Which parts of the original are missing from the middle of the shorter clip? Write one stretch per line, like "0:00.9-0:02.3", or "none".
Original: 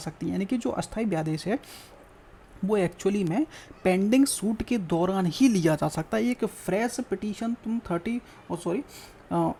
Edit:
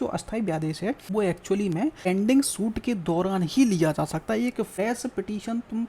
0:01.7-0:02.6
0:03.6-0:03.9
0:06.6-0:06.7

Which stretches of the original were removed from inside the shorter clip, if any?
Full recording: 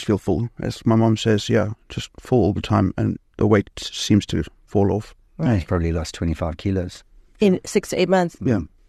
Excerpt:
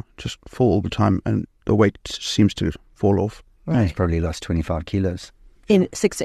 none

